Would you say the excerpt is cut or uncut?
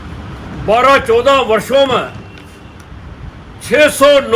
uncut